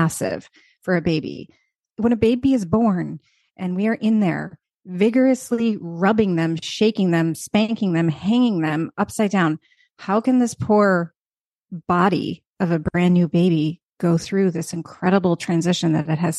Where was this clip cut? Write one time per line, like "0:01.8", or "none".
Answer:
0:01.8